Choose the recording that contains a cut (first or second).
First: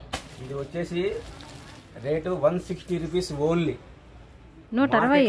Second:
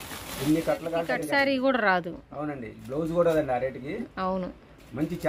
second